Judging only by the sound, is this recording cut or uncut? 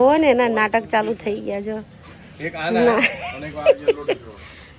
uncut